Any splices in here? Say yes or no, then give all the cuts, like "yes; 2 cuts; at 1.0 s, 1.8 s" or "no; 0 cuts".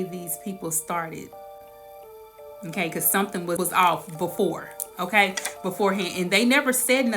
no; 0 cuts